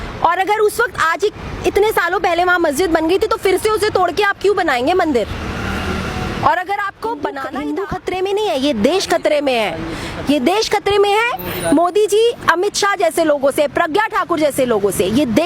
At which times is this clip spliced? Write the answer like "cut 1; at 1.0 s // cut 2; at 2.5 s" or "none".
cut 1; at 7.4 s